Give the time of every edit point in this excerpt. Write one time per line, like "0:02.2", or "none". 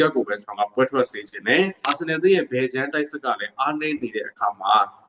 0:01.9